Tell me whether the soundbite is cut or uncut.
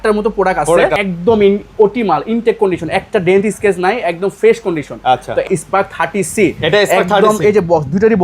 cut